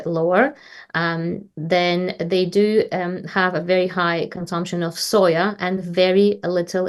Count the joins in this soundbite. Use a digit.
0